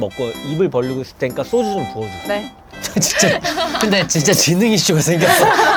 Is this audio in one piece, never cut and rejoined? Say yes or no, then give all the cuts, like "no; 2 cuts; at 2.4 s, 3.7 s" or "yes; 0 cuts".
yes; 0 cuts